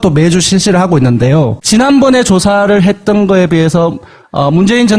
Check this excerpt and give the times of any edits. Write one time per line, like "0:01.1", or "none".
none